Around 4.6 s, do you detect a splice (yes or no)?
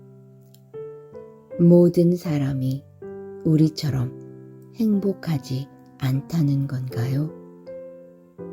no